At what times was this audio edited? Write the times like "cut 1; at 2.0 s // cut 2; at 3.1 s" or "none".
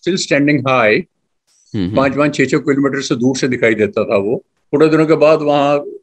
cut 1; at 4.5 s